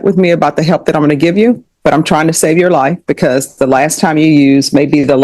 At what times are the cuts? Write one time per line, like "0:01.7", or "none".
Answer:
none